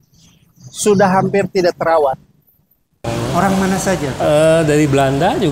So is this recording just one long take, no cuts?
no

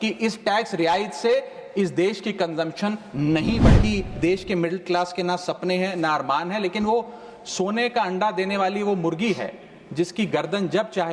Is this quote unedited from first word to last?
no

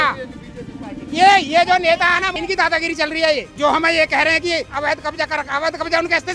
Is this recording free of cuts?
no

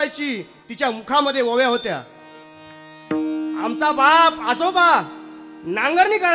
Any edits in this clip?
no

